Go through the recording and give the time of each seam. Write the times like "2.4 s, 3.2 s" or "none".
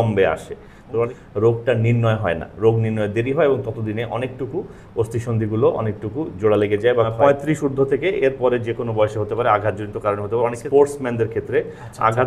1.1 s, 7.1 s, 10.6 s